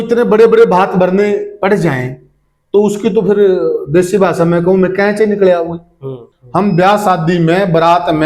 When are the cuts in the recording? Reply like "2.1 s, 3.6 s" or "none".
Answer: 6.2 s